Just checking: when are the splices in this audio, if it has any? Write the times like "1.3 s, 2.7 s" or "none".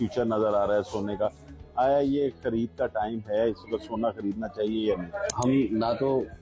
5.3 s